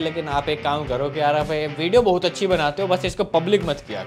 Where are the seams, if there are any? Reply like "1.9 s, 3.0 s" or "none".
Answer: none